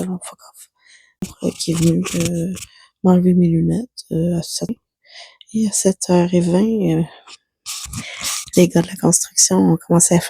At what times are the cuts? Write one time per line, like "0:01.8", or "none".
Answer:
0:01.3
0:04.7